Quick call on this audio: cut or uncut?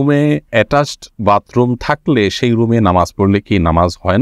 uncut